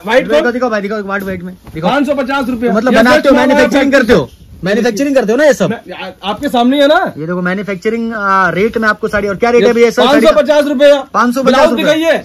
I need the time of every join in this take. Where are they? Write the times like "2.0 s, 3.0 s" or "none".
none